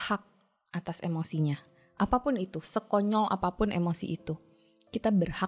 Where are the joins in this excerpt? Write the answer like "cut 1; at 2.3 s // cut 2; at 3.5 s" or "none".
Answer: none